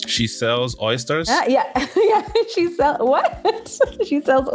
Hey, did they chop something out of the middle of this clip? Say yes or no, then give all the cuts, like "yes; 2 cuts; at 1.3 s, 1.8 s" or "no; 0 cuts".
yes; 1 cut; at 1.2 s